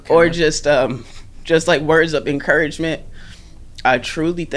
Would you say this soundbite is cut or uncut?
uncut